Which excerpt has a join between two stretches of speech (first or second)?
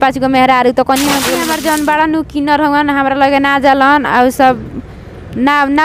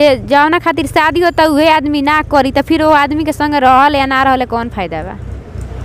first